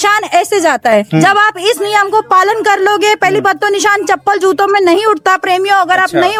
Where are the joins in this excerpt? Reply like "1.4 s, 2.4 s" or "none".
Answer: none